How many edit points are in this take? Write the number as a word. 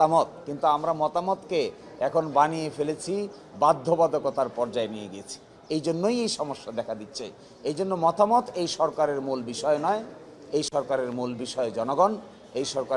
zero